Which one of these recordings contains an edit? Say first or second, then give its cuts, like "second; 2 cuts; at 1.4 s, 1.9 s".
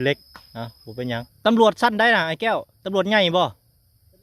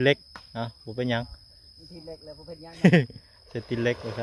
first; 1 cut; at 1.3 s